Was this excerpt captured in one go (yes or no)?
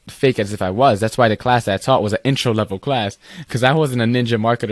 yes